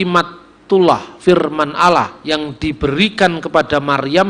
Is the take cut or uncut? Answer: cut